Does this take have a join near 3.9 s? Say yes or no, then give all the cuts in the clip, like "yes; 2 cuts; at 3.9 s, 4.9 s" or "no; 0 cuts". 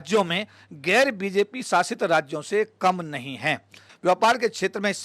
yes; 1 cut; at 3.9 s